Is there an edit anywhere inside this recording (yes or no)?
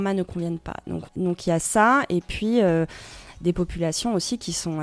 yes